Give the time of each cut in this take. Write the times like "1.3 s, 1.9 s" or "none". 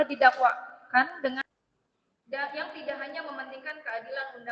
1.4 s